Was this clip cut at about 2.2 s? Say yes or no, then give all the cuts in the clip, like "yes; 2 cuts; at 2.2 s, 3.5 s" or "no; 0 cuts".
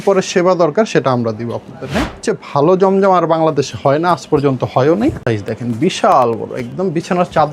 yes; 2 cuts; at 2.2 s, 5.2 s